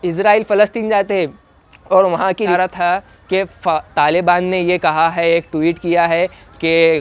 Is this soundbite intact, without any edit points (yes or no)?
no